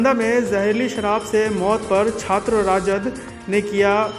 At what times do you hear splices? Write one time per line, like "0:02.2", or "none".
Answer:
none